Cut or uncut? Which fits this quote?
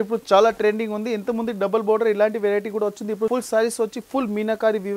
cut